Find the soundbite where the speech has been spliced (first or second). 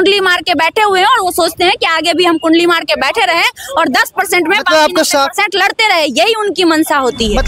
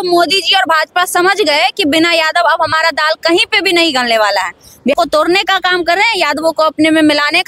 second